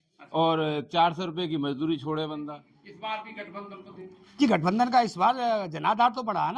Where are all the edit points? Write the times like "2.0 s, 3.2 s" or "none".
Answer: 3.2 s